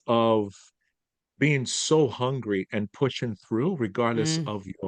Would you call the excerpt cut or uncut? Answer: uncut